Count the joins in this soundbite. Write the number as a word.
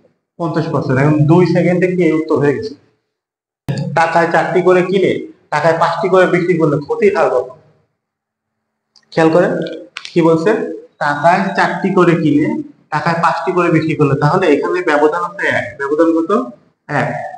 one